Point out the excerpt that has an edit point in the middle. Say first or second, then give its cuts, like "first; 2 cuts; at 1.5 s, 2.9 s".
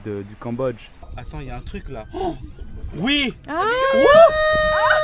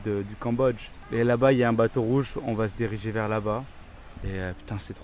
first; 1 cut; at 1.1 s